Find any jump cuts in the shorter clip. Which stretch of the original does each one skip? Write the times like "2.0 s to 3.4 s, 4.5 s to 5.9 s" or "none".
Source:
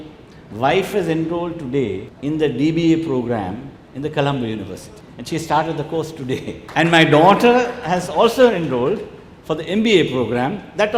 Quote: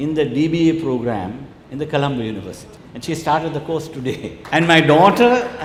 none